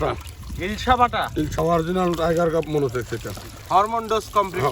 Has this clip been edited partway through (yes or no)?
yes